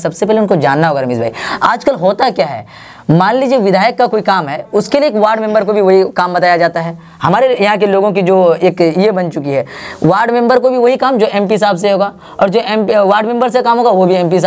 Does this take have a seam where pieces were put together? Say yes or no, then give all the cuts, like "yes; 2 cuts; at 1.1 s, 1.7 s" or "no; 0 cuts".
no; 0 cuts